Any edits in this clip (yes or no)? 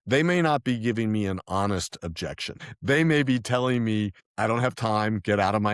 yes